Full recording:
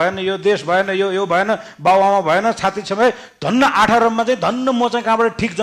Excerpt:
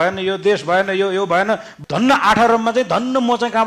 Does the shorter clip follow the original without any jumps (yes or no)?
no